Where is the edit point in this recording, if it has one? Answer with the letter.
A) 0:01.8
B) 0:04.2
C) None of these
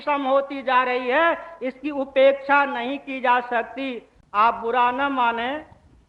C